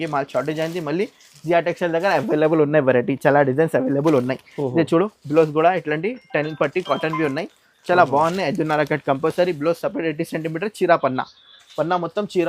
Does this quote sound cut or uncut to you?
uncut